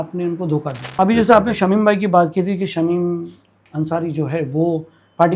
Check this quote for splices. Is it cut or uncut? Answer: cut